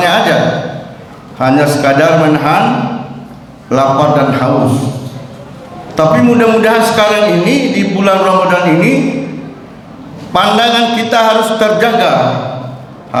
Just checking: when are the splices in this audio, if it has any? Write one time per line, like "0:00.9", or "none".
none

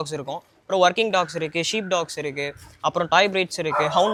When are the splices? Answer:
none

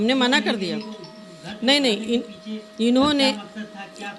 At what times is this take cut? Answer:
none

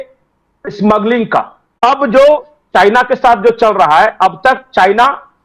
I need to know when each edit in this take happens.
0:01.6

